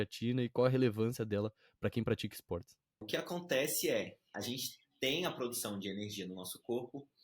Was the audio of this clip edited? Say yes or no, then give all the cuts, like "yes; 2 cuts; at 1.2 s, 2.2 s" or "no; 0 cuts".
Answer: yes; 1 cut; at 3.0 s